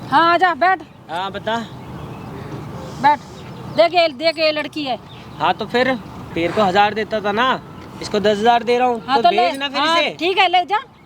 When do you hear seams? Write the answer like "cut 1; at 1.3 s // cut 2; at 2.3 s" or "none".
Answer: cut 1; at 6.2 s